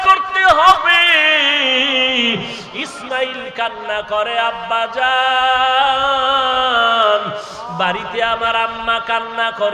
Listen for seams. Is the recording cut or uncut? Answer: uncut